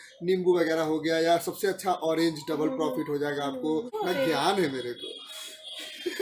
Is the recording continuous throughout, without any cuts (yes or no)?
no